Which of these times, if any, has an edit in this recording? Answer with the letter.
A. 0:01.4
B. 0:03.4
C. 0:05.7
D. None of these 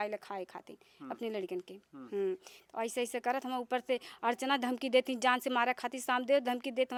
D